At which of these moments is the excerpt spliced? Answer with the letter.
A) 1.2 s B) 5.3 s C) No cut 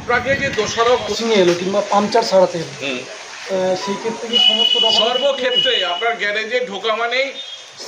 A